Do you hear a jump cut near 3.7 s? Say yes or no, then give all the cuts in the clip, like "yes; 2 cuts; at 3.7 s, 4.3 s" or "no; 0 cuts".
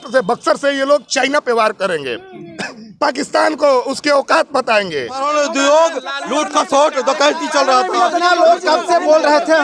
no; 1 cut; at 5.3 s